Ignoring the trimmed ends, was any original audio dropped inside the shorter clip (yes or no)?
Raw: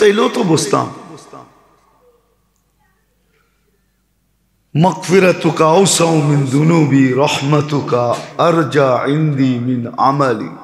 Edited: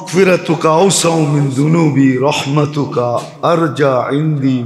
no